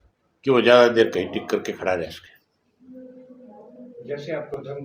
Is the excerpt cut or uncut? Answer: uncut